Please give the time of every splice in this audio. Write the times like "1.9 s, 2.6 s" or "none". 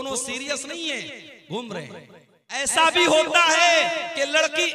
2.6 s